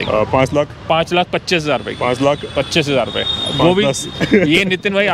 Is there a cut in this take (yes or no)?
no